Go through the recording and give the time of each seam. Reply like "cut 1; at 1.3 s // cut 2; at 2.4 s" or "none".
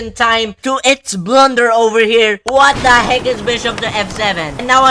none